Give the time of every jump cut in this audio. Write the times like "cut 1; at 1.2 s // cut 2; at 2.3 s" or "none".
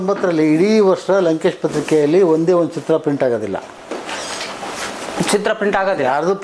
none